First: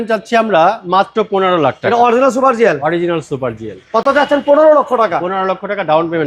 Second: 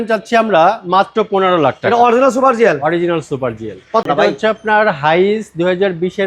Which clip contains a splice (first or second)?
second